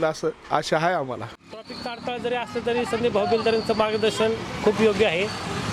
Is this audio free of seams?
no; 1 cut; at 1.5 s

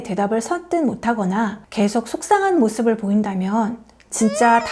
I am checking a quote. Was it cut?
no; 0 cuts

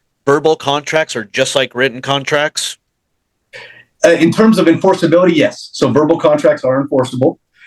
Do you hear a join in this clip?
no; 0 cuts

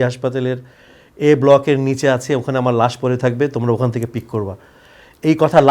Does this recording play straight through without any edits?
yes; 0 cuts

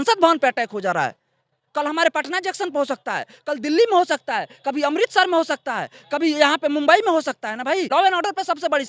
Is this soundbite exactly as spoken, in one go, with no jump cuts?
no; 1 cut; at 7.9 s

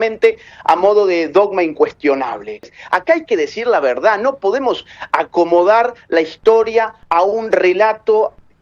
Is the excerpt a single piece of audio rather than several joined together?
no; 1 cut; at 2.7 s

